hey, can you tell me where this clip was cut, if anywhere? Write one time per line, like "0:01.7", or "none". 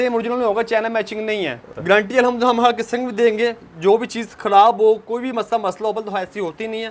0:01.7